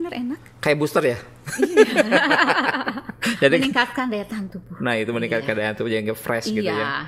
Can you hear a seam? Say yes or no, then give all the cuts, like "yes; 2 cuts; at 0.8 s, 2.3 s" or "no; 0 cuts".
no; 0 cuts